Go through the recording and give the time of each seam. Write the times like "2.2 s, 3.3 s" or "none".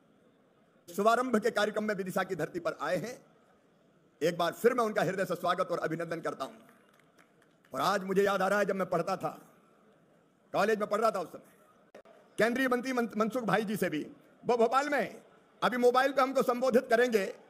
0.9 s